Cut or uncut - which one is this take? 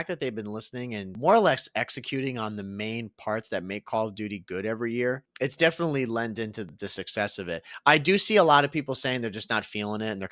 cut